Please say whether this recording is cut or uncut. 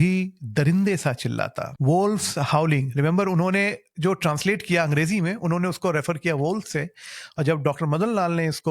cut